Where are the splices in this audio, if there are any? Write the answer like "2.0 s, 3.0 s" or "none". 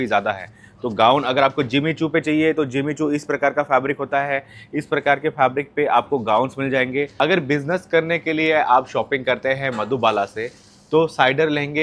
7.1 s